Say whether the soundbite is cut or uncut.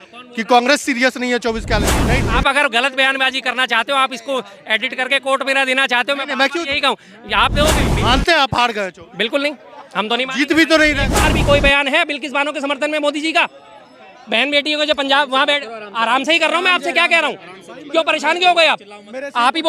cut